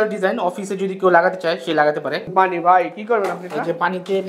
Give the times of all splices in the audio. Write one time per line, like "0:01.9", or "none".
0:02.3